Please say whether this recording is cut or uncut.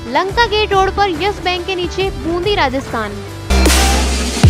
cut